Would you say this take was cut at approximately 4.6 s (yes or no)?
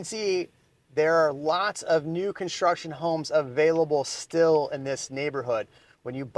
no